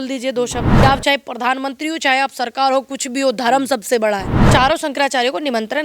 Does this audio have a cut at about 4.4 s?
yes; 2 cuts; at 0.8 s, 4.4 s

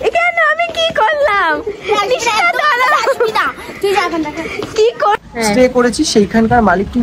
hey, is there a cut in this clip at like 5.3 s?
yes; 1 cut; at 5.3 s

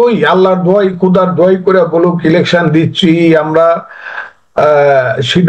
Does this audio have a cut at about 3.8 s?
no; 0 cuts

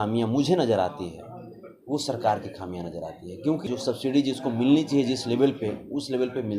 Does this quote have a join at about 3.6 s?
yes; 1 cut; at 3.6 s

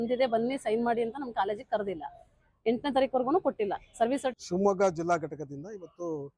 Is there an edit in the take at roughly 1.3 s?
no; 1 cut; at 4.4 s

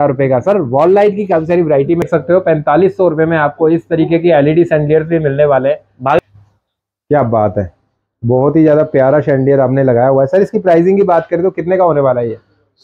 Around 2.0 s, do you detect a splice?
yes; 2 cuts; at 2.0 s, 6.2 s

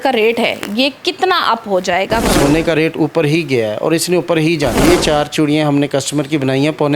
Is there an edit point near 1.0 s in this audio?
no; 2 cuts; at 2.2 s, 4.8 s

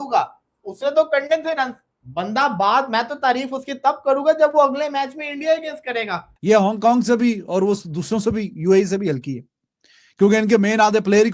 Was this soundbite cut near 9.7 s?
no; 1 cut; at 6.3 s

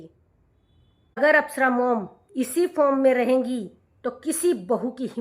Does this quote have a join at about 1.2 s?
yes; 1 cut; at 1.2 s

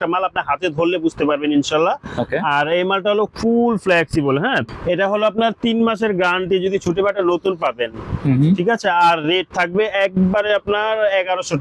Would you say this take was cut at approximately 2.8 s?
no; 1 cut; at 4.7 s

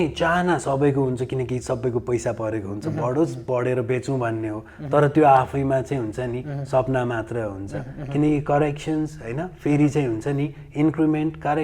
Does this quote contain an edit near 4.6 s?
no; 0 cuts

